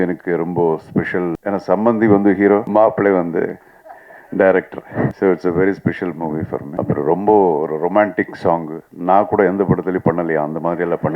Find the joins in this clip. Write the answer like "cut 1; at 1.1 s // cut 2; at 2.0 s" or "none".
cut 1; at 1.4 s // cut 2; at 2.7 s // cut 3; at 5.1 s // cut 4; at 6.7 s